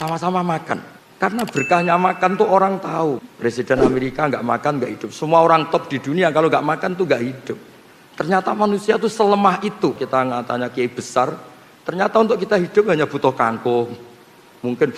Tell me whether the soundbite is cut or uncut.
cut